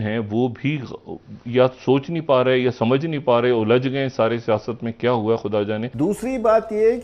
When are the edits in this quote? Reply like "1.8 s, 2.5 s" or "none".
5.9 s